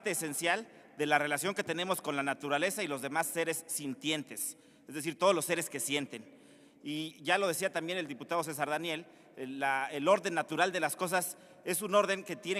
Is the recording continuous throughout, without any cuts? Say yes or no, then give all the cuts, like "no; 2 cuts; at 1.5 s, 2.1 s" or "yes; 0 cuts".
yes; 0 cuts